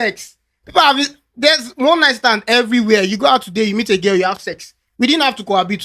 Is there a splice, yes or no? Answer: no